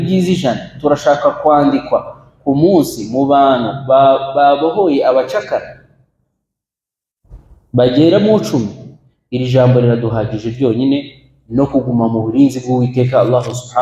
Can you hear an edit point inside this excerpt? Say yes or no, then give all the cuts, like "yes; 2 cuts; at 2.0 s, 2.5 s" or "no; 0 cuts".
no; 0 cuts